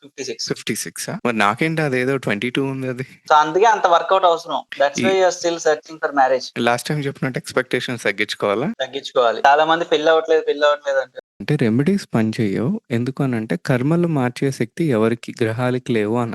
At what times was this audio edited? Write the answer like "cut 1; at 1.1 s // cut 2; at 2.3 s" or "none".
cut 1; at 11.3 s